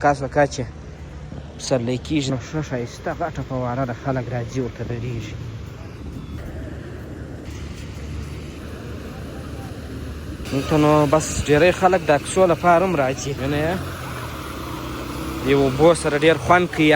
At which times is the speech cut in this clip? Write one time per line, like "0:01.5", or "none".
0:02.3
0:06.4
0:07.4
0:08.6
0:13.4